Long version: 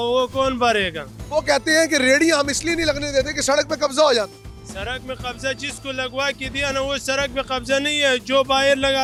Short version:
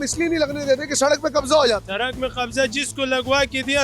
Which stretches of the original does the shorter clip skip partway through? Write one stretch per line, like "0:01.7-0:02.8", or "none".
0:04.3-0:04.7